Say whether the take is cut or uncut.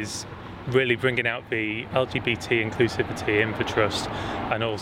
cut